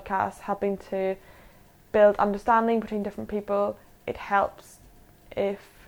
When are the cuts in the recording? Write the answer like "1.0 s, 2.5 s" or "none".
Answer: none